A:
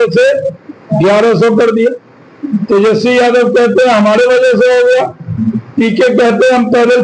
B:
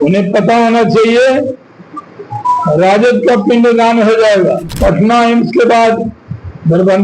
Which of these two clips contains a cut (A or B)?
B